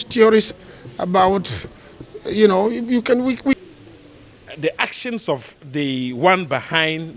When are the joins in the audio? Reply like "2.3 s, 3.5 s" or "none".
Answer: 3.6 s

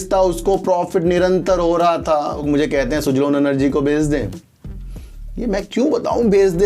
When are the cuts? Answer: 2.4 s

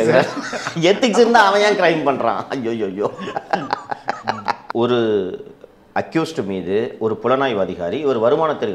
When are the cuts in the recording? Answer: 4.6 s

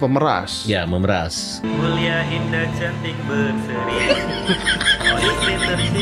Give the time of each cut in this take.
1.6 s

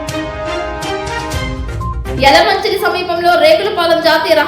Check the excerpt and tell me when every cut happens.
2.0 s

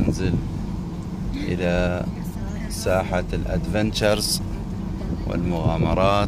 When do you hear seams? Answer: none

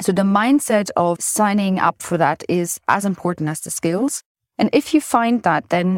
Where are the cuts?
0.9 s

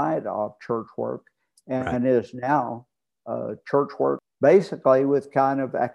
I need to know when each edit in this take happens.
4.3 s

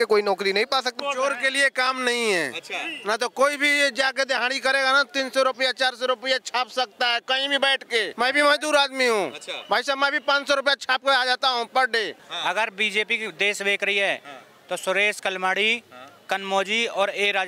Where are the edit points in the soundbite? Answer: 0.9 s, 8.1 s, 12.2 s

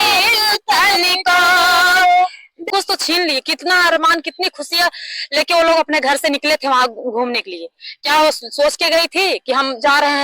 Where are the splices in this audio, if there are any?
2.7 s

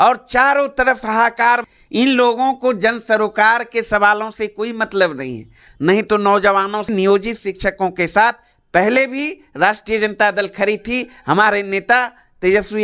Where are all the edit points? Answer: 1.7 s, 6.9 s

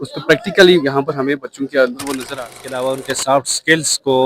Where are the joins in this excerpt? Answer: 2.1 s

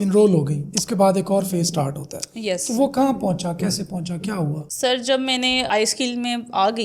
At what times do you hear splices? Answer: none

